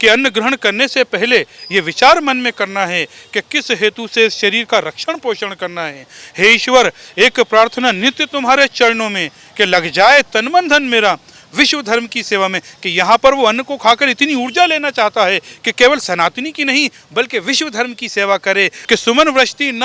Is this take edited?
yes; 1 cut; at 18.8 s

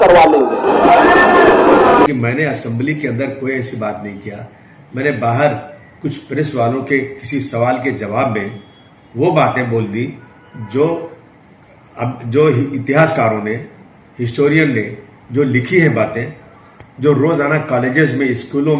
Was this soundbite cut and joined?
yes; 1 cut; at 2.1 s

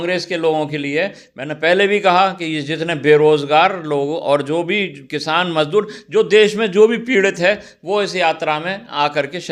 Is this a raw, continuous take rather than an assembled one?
yes; 0 cuts

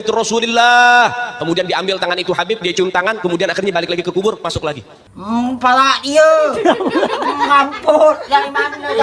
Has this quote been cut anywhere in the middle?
no; 0 cuts

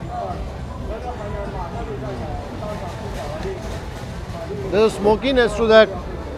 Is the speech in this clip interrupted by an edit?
no; 0 cuts

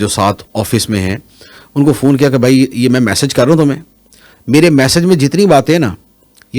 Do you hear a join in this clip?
no; 0 cuts

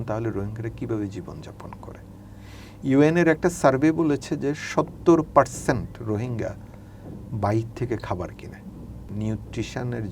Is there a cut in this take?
yes; 1 cut; at 9.0 s

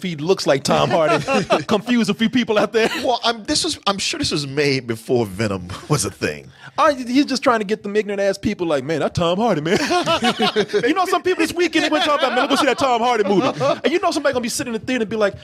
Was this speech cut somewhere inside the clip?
no; 0 cuts

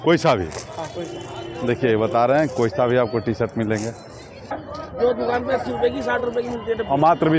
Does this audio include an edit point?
yes; 1 cut; at 4.6 s

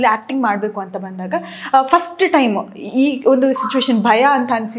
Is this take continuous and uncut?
yes; 0 cuts

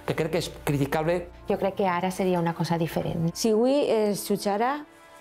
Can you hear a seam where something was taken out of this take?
yes; 2 cuts; at 1.3 s, 3.3 s

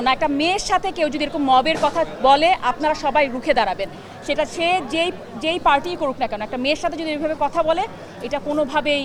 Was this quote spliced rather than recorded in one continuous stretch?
no; 0 cuts

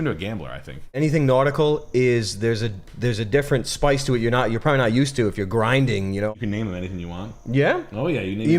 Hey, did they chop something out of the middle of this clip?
yes; 2 cuts; at 1.0 s, 6.3 s

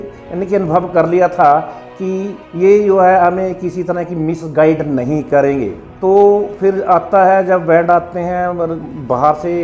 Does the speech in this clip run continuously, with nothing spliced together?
yes; 0 cuts

